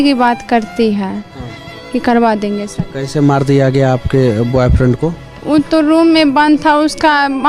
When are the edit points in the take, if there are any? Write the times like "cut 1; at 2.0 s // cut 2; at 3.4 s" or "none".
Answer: cut 1; at 2.7 s